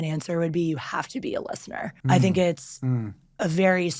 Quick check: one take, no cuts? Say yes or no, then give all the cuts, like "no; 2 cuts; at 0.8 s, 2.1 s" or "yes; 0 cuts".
no; 1 cut; at 1.9 s